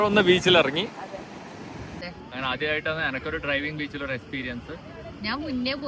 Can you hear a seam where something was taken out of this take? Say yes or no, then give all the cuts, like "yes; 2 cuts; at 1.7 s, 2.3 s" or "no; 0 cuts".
yes; 1 cut; at 2.1 s